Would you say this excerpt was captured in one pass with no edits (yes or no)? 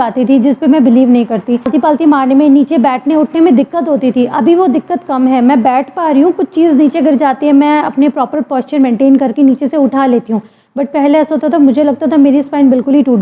no